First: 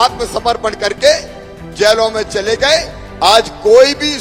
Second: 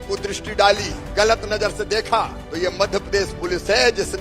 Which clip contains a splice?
second; 2 cuts; at 1.0 s, 2.4 s

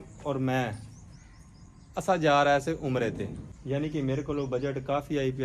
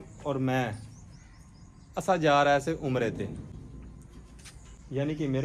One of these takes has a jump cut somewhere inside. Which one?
first; 1 cut; at 3.5 s

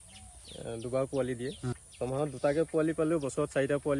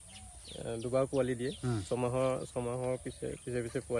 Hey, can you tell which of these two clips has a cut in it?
first; 1 cut; at 1.8 s

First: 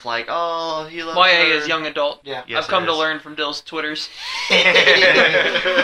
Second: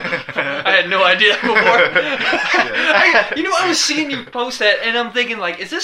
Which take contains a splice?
first; 1 cut; at 2.3 s

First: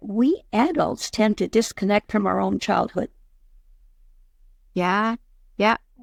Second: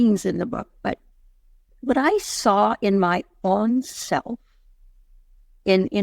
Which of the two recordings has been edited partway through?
second; 1 cut; at 1.6 s

